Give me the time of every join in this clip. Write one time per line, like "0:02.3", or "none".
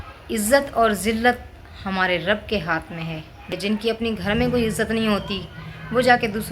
0:03.6

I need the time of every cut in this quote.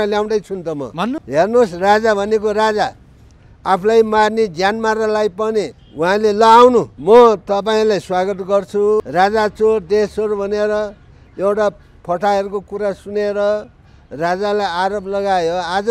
0:01.2
0:05.8
0:06.9
0:09.0

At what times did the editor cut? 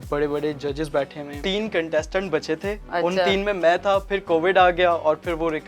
0:01.5

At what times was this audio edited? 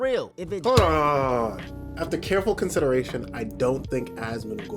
none

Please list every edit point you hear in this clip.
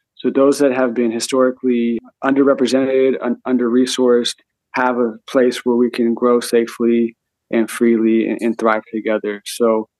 0:02.0

